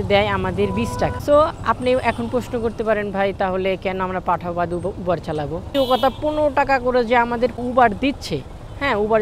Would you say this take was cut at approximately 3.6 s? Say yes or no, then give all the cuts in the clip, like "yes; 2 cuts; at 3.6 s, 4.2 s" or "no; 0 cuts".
no; 3 cuts; at 1.2 s, 5.7 s, 7.5 s